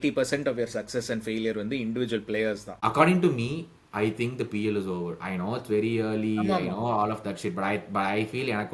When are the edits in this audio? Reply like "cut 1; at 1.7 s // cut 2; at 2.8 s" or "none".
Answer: cut 1; at 2.7 s